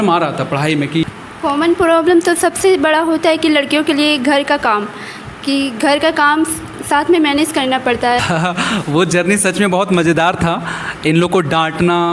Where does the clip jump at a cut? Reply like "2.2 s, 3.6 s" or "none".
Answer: 1.0 s, 8.2 s